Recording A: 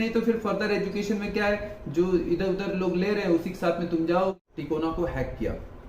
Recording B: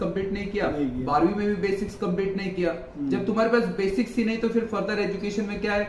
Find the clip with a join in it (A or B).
A